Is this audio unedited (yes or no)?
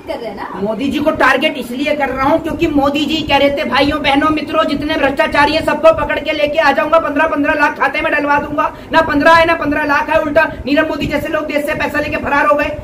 yes